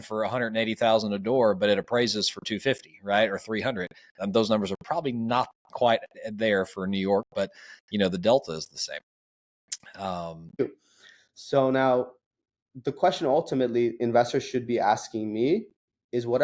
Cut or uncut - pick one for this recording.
cut